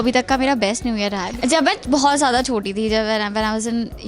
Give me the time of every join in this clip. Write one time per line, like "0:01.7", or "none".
0:01.3